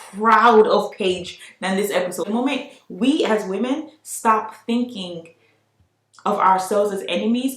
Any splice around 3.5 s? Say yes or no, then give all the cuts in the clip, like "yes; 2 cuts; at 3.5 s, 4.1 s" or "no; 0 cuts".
no; 1 cut; at 2.3 s